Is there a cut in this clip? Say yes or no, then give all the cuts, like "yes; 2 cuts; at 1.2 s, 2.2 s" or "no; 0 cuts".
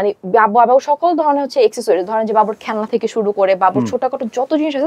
no; 0 cuts